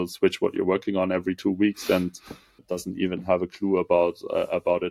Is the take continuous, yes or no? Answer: no